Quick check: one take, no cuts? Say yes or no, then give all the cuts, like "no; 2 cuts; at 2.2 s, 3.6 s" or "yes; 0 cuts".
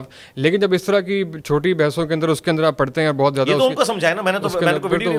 yes; 0 cuts